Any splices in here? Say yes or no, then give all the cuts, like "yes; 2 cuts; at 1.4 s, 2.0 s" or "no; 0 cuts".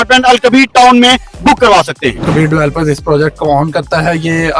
yes; 1 cut; at 2.2 s